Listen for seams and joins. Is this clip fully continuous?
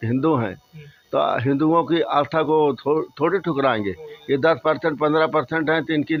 yes; 0 cuts

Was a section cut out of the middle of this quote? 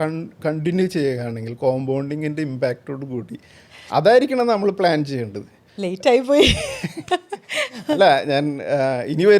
no; 0 cuts

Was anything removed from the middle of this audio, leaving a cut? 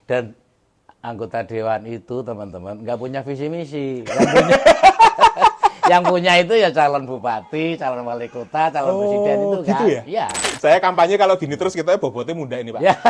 yes; 1 cut; at 10.5 s

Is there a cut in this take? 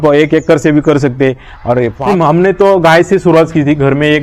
yes; 1 cut; at 2.0 s

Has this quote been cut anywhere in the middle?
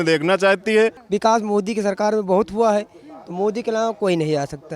yes; 1 cut; at 1.0 s

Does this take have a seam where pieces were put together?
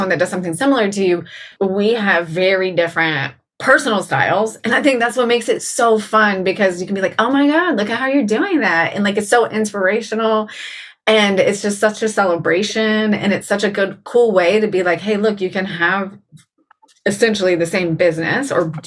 yes; 1 cut; at 1.5 s

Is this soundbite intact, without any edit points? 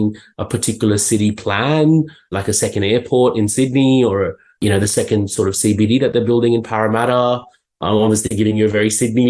no; 1 cut; at 2.3 s

